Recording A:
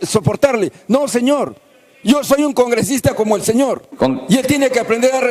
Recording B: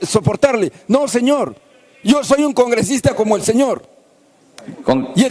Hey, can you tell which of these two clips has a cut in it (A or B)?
A